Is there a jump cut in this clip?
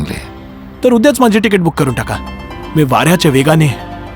no; 0 cuts

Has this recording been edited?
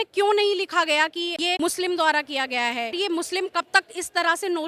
yes; 2 cuts; at 1.5 s, 2.9 s

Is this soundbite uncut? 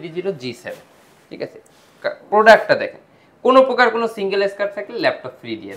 yes; 0 cuts

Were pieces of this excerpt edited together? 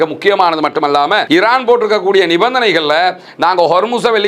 yes; 1 cut; at 1.2 s

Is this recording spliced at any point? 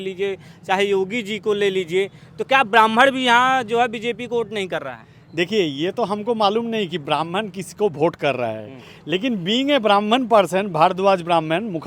no; 0 cuts

